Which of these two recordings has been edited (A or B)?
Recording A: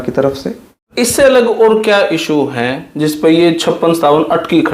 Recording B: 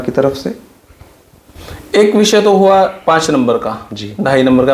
A